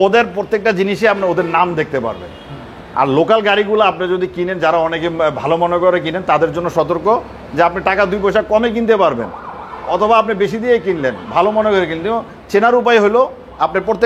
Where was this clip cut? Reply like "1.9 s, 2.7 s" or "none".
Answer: none